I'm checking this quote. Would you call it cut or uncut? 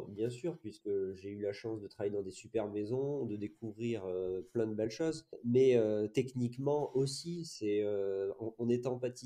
cut